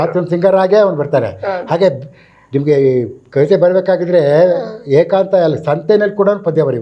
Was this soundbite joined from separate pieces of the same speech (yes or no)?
no